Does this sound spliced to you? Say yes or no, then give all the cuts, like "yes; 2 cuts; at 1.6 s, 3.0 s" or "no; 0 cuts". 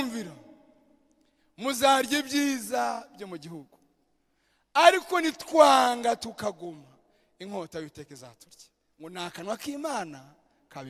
no; 0 cuts